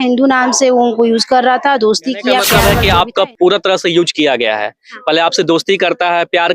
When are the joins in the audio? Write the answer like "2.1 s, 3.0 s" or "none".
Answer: 2.5 s